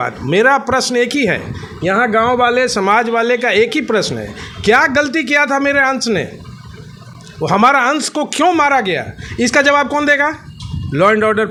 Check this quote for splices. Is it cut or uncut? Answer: uncut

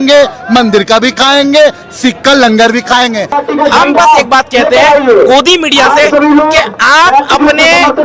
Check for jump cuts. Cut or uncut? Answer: cut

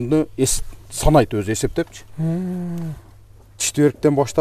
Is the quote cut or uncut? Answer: uncut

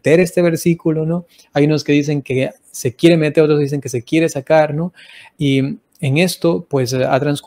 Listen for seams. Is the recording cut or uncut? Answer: uncut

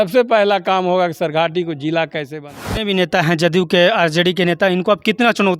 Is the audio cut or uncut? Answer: cut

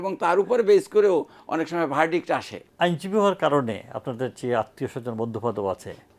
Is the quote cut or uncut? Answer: cut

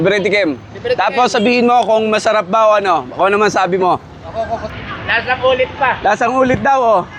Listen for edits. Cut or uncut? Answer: cut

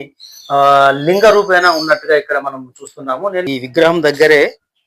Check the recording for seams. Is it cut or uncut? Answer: cut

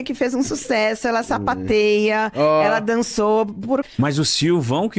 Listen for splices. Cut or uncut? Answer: cut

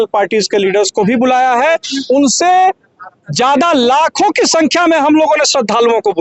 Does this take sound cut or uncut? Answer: uncut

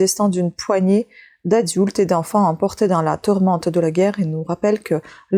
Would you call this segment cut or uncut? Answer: uncut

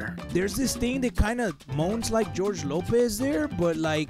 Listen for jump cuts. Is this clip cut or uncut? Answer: uncut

